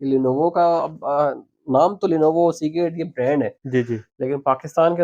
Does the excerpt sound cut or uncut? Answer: uncut